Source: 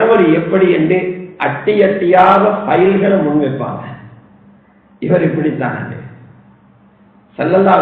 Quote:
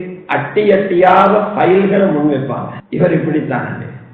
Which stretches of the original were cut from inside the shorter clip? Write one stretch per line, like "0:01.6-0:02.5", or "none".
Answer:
0:04.1-0:05.1